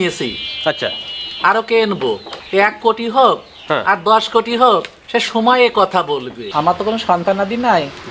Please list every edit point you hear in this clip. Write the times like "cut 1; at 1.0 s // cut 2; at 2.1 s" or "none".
cut 1; at 2.3 s // cut 2; at 6.5 s

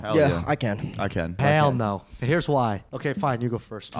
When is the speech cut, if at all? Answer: cut 1; at 1.4 s // cut 2; at 2.9 s

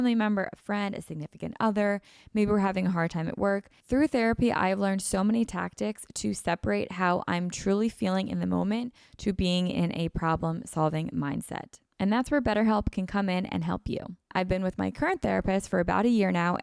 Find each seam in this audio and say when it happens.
cut 1; at 14.3 s

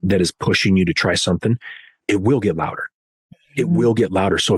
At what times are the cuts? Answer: cut 1; at 2.0 s

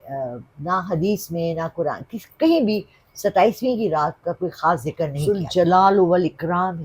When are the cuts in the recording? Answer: cut 1; at 5.2 s

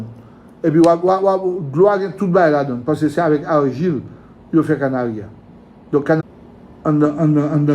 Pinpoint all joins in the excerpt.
cut 1; at 6.2 s

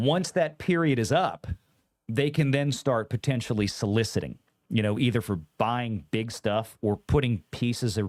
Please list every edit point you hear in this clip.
none

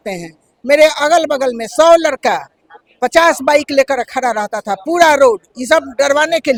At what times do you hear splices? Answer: none

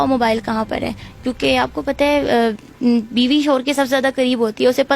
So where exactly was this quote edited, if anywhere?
none

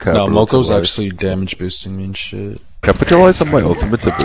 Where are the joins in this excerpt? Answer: cut 1; at 2.7 s

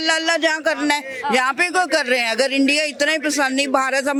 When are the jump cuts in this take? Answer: none

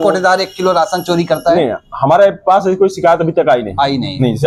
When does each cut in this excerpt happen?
none

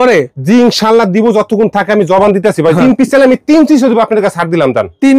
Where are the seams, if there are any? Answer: cut 1; at 2.8 s

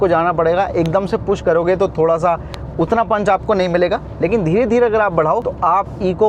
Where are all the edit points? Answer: none

